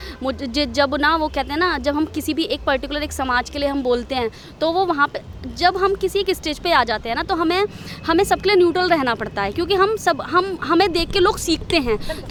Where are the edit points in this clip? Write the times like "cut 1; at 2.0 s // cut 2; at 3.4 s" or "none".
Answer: none